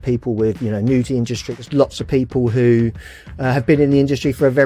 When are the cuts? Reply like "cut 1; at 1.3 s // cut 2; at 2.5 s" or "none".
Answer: cut 1; at 1.4 s